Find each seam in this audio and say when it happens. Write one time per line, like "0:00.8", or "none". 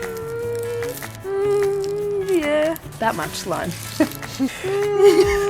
0:01.1
0:02.9
0:04.5